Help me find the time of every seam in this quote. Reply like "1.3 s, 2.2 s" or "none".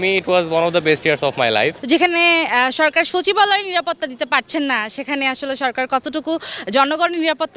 1.8 s